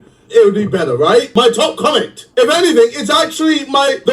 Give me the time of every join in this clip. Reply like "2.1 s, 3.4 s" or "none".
1.3 s

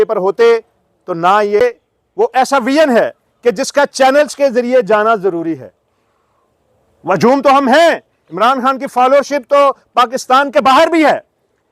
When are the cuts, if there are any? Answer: 1.6 s

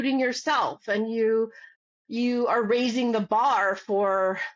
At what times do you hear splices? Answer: none

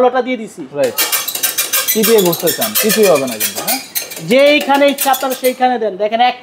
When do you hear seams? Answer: none

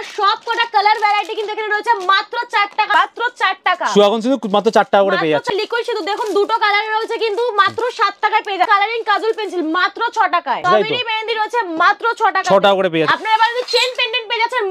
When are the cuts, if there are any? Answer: 2.9 s, 5.5 s, 8.7 s, 10.6 s, 13.1 s

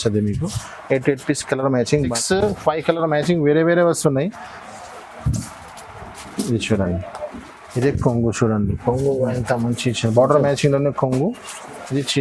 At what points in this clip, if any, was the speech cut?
2.1 s

